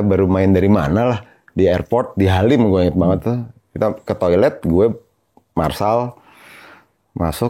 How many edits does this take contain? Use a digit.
0